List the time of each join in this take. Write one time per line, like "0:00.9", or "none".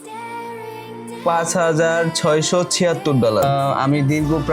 0:03.4